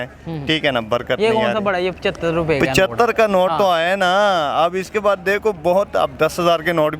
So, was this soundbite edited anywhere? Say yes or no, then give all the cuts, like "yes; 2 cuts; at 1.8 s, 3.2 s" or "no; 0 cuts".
no; 0 cuts